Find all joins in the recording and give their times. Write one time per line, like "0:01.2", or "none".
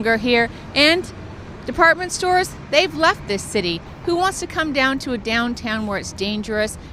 0:01.0